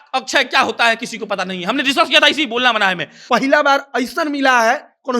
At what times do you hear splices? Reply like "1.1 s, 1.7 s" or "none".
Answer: 3.1 s